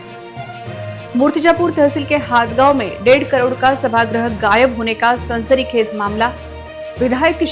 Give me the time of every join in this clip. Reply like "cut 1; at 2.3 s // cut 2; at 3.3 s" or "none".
none